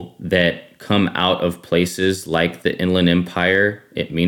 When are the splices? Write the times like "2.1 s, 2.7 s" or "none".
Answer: none